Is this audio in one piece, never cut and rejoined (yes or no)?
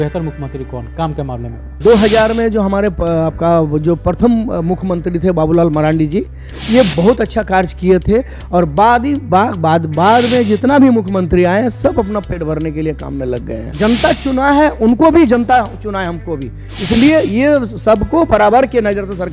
no